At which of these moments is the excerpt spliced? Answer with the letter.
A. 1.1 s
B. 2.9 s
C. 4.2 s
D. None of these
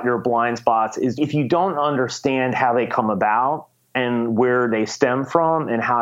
A